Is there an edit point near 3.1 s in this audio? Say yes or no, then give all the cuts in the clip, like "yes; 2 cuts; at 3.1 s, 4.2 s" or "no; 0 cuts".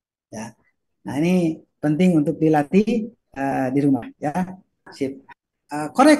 no; 1 cut; at 5.2 s